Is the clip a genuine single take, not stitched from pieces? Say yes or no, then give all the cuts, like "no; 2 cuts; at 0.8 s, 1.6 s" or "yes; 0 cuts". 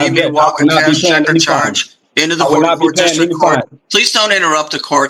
yes; 0 cuts